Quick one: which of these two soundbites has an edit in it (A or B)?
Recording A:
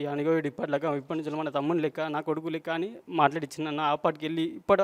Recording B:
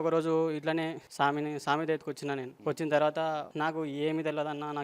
B